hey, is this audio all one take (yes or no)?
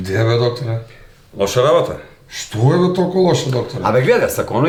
yes